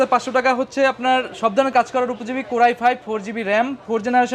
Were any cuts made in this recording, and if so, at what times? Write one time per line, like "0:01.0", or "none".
none